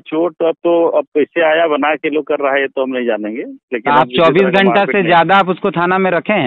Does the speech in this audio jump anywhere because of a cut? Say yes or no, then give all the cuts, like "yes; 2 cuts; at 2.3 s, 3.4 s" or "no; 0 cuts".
no; 0 cuts